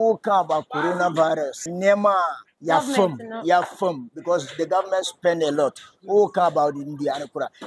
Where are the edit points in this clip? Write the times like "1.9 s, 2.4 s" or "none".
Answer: 1.6 s, 2.5 s